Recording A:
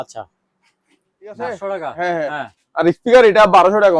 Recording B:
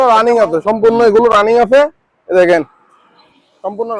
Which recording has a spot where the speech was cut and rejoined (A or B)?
A